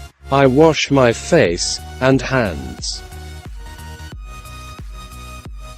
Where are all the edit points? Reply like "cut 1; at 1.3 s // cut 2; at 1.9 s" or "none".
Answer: cut 1; at 2.8 s